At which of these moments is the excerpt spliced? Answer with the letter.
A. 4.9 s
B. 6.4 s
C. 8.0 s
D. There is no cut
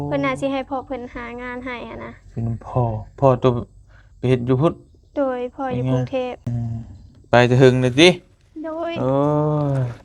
B